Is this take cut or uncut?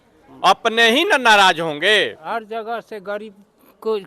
cut